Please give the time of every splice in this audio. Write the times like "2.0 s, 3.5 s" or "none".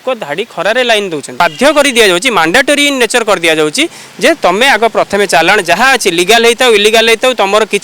1.3 s